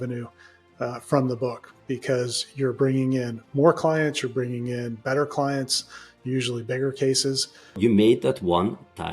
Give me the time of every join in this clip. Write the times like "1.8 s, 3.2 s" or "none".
7.8 s